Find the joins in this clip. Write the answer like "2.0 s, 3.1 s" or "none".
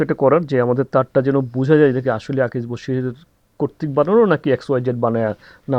none